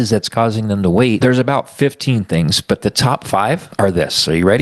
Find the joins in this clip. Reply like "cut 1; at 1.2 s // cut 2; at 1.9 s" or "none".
cut 1; at 1.2 s // cut 2; at 3.7 s